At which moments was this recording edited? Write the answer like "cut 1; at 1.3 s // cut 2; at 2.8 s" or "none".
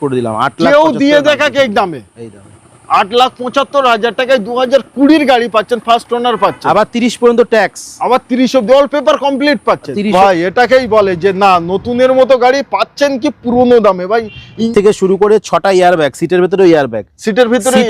cut 1; at 10.1 s // cut 2; at 14.7 s